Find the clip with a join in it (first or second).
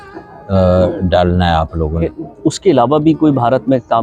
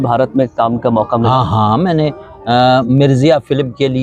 first